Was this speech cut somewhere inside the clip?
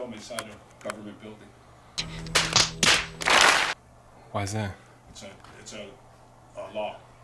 no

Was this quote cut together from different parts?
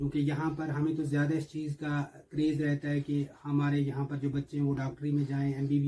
no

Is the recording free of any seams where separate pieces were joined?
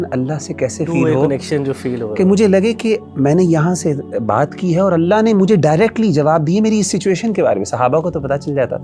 yes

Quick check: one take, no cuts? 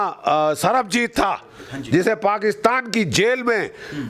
yes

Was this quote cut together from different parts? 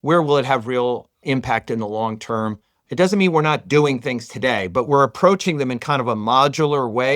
yes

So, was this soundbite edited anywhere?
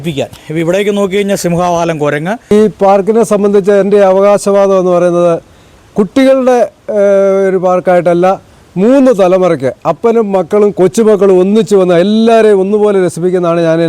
yes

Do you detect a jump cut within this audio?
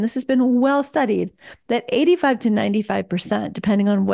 no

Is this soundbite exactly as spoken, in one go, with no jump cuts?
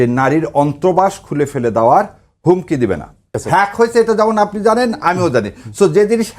no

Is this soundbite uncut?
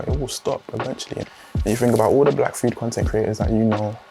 no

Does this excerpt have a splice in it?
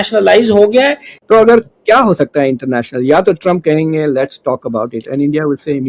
yes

